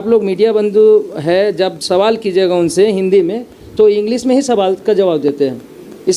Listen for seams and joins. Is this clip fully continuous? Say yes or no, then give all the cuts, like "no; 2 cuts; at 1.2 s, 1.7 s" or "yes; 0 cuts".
yes; 0 cuts